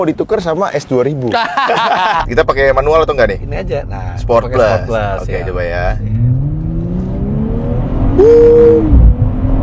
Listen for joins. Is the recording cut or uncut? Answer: cut